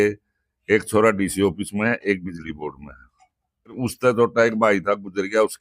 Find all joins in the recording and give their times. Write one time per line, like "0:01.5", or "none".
0:03.8